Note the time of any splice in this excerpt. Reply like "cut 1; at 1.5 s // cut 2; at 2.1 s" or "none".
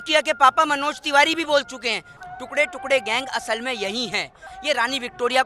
cut 1; at 2.1 s // cut 2; at 4.5 s